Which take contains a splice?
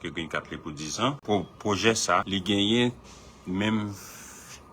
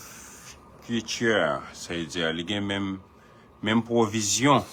first; 2 cuts; at 1.2 s, 2.3 s

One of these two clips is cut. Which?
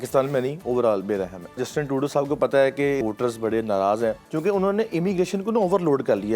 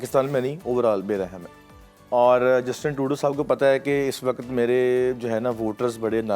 first; 3 cuts; at 1.6 s, 3.0 s, 4.3 s

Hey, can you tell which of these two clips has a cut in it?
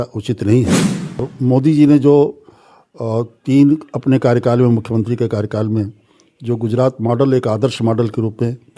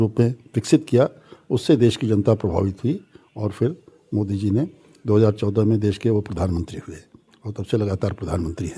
first; 1 cut; at 1.3 s

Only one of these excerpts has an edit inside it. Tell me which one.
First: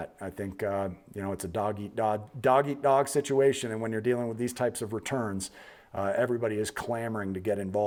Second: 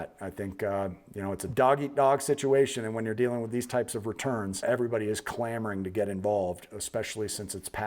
second; 2 cuts; at 1.4 s, 4.6 s

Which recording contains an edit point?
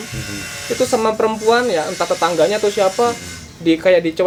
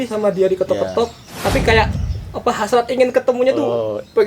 second; 1 cut; at 1.3 s

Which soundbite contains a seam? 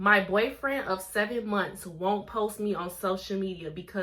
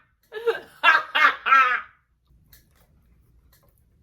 second; 1 cut; at 2.3 s

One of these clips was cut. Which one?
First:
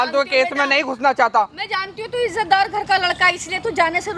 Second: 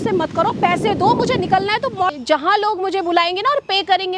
second; 1 cut; at 2.1 s

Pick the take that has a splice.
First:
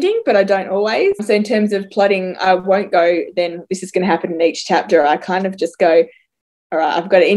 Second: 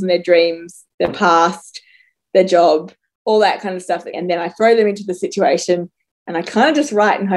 second; 1 cut; at 4.2 s

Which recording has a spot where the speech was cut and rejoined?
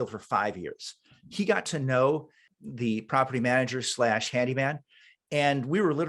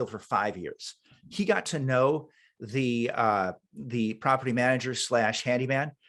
first; 1 cut; at 2.5 s

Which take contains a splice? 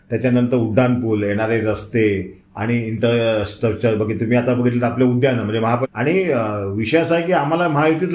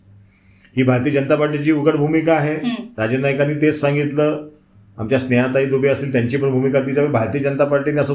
first; 1 cut; at 5.8 s

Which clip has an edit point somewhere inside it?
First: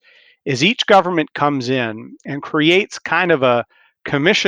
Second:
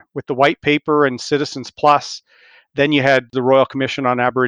second; 1 cut; at 3.3 s

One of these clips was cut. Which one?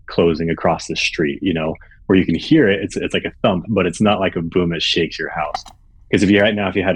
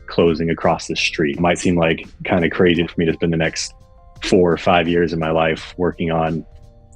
second; 2 cuts; at 1.4 s, 2.9 s

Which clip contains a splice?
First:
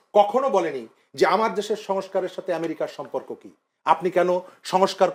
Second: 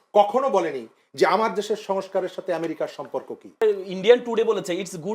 second; 1 cut; at 3.6 s

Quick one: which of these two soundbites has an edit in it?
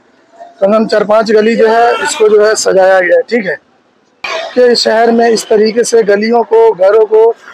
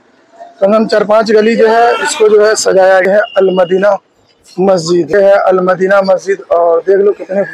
second; 2 cuts; at 3.1 s, 5.1 s

